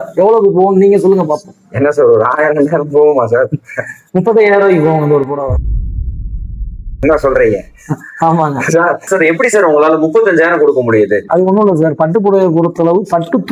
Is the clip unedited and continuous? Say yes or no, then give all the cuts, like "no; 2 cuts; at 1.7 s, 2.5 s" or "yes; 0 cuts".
yes; 0 cuts